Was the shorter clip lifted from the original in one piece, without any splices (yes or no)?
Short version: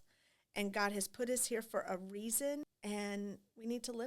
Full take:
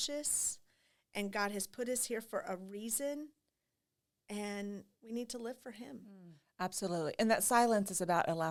no